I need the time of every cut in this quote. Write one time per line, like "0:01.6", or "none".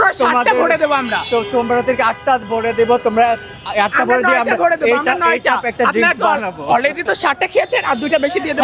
none